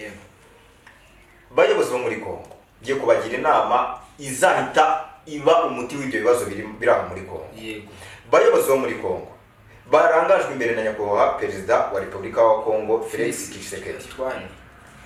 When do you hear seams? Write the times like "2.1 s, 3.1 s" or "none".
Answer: none